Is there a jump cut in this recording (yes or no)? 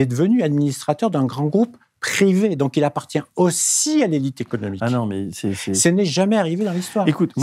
no